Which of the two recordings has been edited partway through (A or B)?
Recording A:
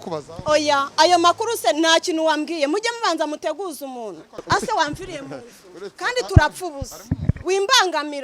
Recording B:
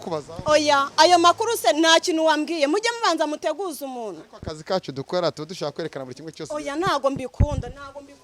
A